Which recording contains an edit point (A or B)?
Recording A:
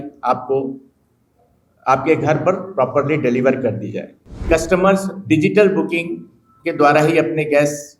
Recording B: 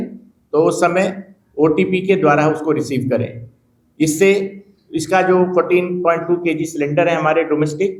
A